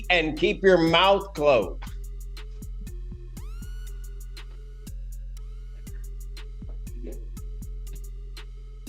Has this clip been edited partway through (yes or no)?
no